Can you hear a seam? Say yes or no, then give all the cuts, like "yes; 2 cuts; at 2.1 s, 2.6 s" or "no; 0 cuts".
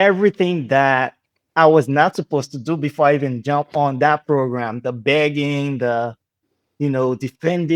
no; 0 cuts